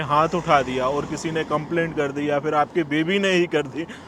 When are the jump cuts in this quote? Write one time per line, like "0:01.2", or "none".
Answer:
none